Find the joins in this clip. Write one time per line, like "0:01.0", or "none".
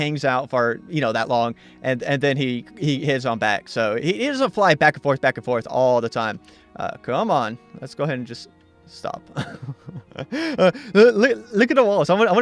none